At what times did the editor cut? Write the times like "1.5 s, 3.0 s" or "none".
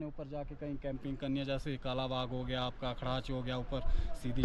none